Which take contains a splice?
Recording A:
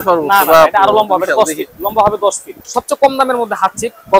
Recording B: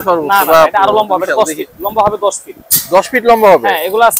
A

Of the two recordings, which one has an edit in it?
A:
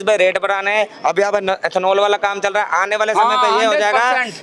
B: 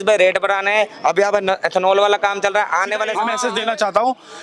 B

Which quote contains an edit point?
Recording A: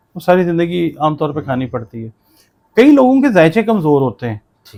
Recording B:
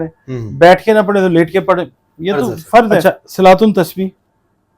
B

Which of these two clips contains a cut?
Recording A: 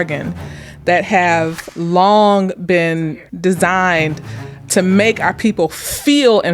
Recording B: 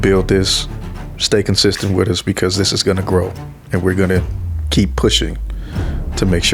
A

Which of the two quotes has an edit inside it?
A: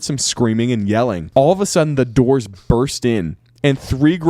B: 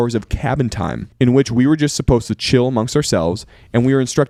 A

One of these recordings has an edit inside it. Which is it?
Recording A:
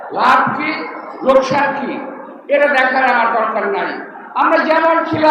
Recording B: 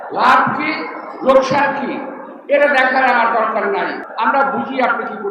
B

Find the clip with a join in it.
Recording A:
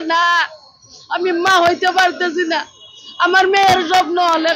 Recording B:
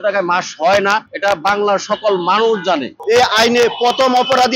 B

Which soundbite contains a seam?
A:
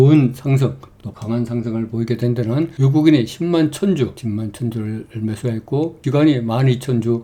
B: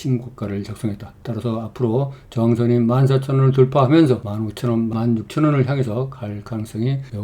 B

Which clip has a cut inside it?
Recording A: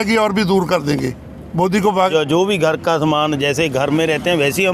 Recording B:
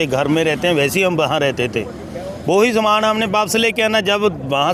A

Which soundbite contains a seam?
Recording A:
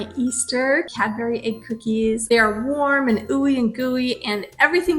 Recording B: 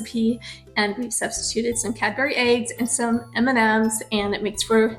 A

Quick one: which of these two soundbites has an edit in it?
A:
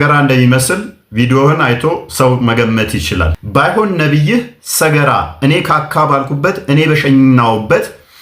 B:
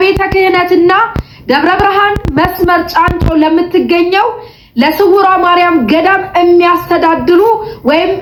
A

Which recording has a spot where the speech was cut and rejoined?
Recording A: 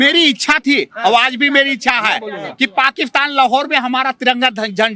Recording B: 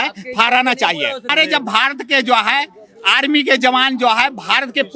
B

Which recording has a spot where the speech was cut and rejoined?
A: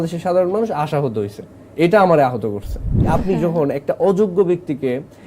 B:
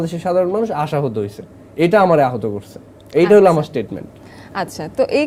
A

